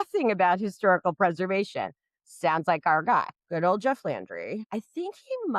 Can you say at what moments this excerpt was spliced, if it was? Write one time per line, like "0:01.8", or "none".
0:03.4
0:04.6

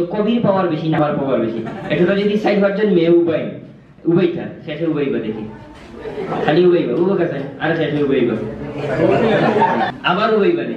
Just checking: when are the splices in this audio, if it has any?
0:01.0
0:09.9

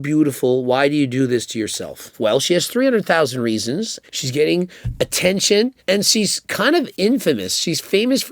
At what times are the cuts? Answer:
0:02.0
0:04.0

